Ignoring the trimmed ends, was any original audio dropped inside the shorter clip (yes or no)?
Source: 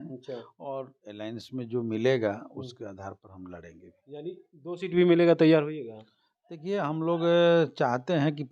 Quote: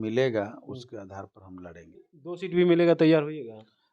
yes